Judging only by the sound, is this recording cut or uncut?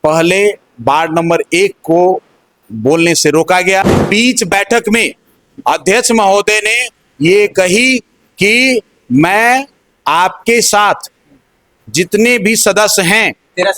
cut